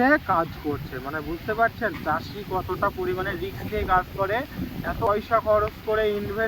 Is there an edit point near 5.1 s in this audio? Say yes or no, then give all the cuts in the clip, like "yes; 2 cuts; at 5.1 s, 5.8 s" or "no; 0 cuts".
yes; 1 cut; at 5.1 s